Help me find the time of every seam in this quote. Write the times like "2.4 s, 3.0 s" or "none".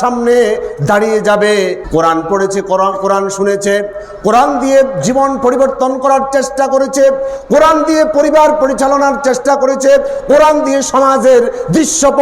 1.8 s